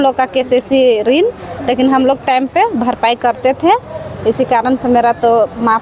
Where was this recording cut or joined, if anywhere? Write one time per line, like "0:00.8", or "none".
none